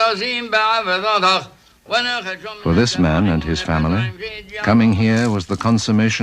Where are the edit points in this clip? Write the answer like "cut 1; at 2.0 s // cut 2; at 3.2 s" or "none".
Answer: cut 1; at 4.0 s